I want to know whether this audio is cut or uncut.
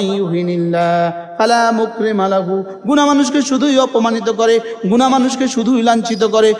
uncut